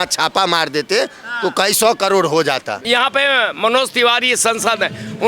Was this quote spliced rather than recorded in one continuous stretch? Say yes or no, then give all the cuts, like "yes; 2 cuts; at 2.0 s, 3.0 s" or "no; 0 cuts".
yes; 1 cut; at 2.8 s